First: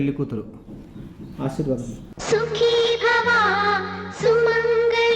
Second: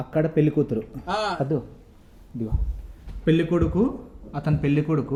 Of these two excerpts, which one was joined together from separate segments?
first; 1 cut; at 2.1 s

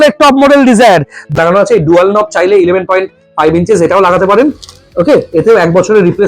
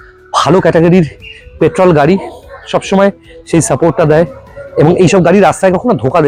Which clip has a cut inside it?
first; 1 cut; at 1.4 s

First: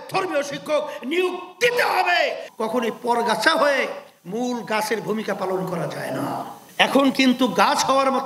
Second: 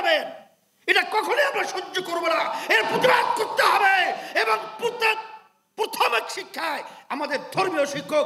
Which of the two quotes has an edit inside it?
first; 1 cut; at 2.5 s

